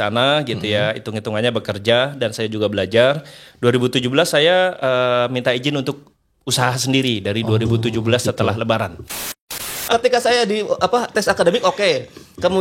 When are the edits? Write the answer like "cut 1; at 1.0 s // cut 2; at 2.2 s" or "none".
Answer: cut 1; at 9.6 s